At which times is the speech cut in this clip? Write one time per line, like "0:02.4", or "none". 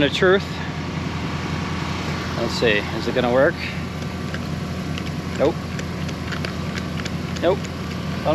none